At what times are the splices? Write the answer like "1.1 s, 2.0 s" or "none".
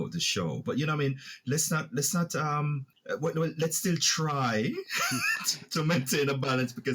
2.9 s